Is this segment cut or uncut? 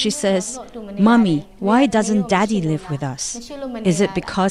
uncut